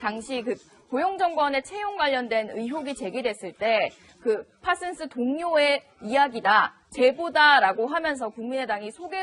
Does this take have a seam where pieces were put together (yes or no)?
no